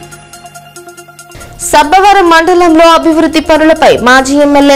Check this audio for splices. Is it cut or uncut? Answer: cut